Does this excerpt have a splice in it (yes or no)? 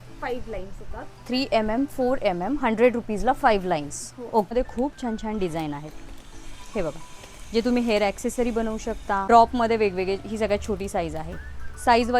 yes